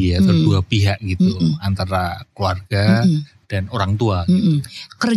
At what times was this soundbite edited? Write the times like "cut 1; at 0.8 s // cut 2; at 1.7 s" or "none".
none